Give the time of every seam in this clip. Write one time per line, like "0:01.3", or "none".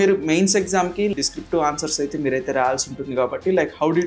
0:01.1